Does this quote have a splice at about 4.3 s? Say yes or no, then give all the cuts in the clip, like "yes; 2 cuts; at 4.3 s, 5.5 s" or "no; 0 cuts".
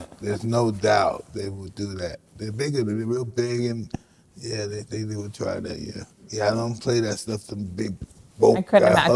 no; 1 cut; at 6.2 s